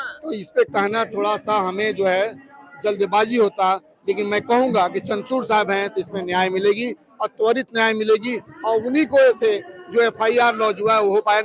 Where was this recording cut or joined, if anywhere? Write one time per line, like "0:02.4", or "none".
none